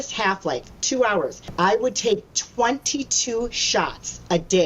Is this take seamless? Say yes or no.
no